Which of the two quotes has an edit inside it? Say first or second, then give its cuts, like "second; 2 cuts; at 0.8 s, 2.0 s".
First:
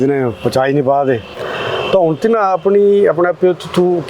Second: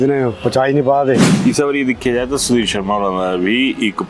second; 1 cut; at 1.3 s